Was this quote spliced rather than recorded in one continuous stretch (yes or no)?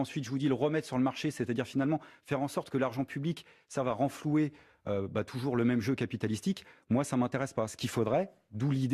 yes